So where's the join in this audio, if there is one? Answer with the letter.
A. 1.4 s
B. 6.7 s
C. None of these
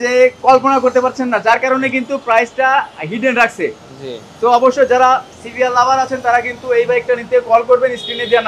C